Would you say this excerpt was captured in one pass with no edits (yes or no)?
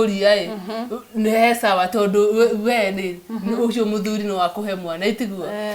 yes